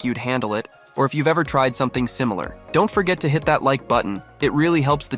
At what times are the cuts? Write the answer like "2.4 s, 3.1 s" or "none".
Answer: 2.5 s, 4.2 s